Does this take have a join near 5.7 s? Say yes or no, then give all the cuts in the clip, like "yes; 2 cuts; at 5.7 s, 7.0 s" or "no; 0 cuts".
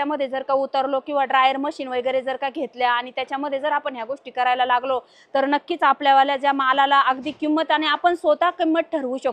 no; 0 cuts